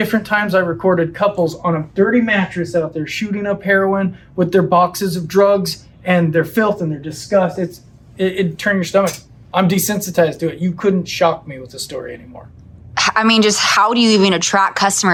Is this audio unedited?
yes; 0 cuts

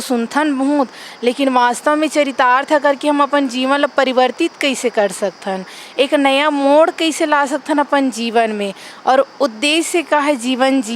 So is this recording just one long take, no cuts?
yes; 0 cuts

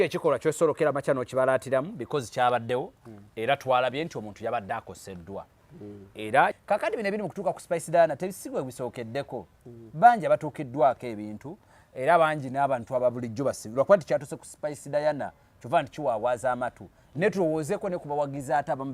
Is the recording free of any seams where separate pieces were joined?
no; 1 cut; at 6.5 s

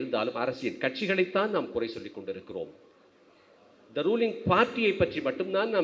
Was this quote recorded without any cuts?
yes; 0 cuts

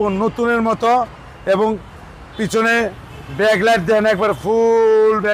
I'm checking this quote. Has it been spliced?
no; 0 cuts

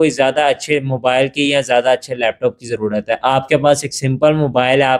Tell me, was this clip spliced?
no; 0 cuts

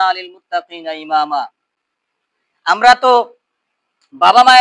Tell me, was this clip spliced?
no; 0 cuts

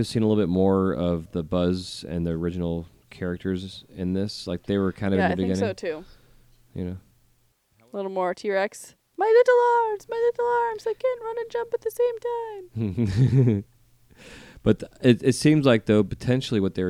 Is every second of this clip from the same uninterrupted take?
no; 1 cut; at 8.0 s

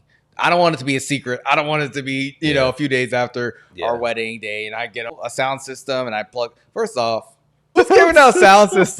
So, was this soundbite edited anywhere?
yes; 2 cuts; at 5.1 s, 7.7 s

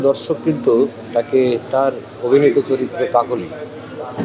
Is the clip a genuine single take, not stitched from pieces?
yes; 0 cuts

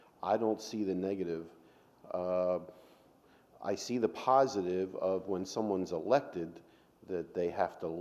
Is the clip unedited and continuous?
yes; 0 cuts

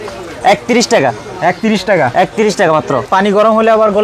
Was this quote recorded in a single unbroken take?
no; 1 cut; at 3.1 s

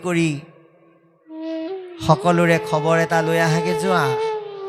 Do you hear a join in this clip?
no; 0 cuts

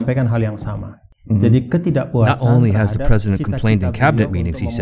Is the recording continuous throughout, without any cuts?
no; 1 cut; at 2.3 s

